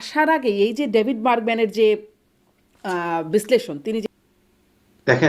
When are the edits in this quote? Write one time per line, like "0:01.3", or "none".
0:04.0